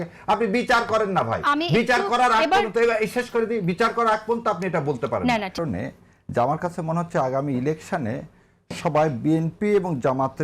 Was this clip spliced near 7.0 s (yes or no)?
no